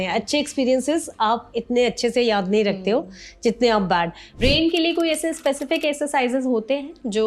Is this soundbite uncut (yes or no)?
no